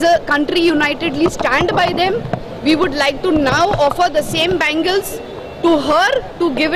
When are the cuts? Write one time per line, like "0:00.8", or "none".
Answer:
none